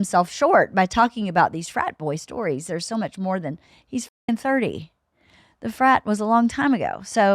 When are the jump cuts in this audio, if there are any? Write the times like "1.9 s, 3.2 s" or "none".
none